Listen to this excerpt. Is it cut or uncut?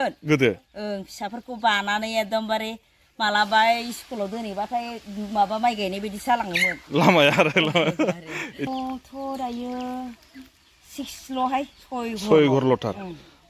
cut